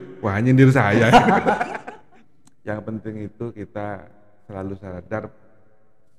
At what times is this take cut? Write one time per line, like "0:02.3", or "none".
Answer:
0:01.7